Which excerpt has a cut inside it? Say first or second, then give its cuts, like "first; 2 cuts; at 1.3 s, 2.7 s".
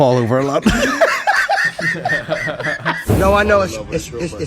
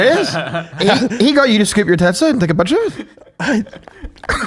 first; 1 cut; at 3.1 s